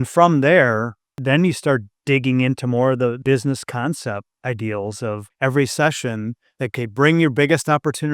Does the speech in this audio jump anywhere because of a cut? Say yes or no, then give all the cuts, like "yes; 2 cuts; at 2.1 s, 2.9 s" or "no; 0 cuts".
yes; 6 cuts; at 1.2 s, 1.9 s, 3.2 s, 4.3 s, 5.3 s, 6.7 s